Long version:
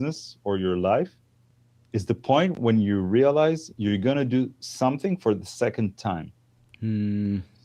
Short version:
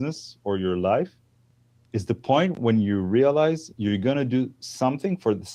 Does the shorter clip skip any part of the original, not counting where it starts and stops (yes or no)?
no